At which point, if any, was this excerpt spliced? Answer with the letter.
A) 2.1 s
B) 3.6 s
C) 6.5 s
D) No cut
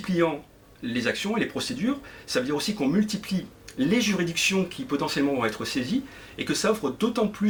D